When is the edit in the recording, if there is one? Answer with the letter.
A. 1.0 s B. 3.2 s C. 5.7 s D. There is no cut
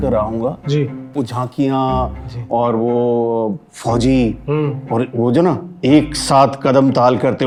D